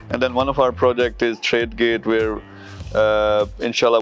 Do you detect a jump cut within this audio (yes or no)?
no